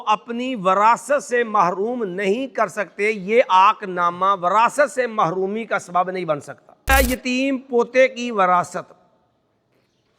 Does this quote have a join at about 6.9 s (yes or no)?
yes